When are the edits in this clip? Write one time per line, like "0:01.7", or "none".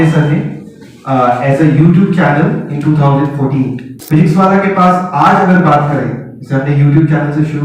0:03.9

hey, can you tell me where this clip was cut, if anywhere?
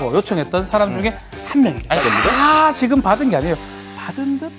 0:02.0

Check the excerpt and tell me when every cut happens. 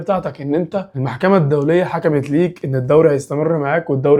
none

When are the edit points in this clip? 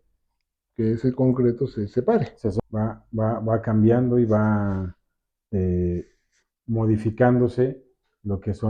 0:02.6

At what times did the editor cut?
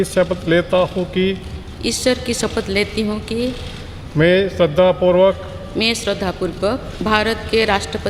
0:06.9

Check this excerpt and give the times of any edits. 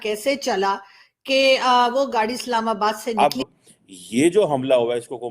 0:03.2

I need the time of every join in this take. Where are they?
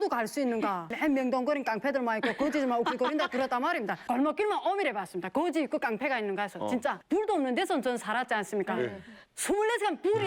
0:00.9
0:04.0
0:07.0

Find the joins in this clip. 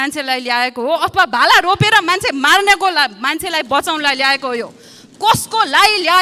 none

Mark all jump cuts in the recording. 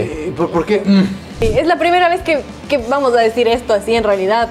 0:01.5
0:02.5

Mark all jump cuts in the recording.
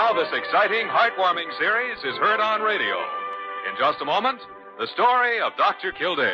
0:03.6

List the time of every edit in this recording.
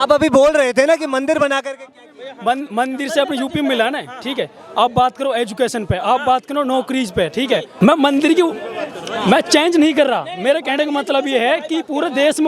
none

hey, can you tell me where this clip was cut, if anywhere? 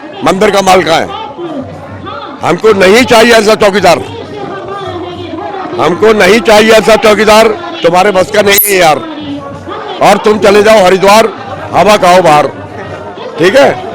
none

